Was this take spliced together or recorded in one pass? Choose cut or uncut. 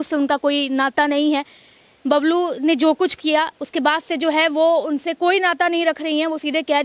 uncut